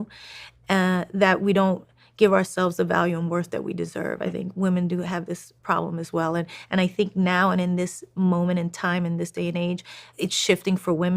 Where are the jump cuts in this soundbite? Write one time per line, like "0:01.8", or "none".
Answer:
0:10.1